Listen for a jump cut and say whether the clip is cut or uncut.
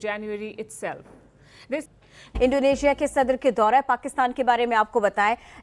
cut